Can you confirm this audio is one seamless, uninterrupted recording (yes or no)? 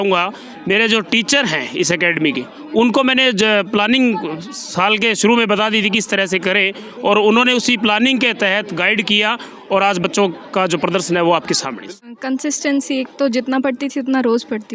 no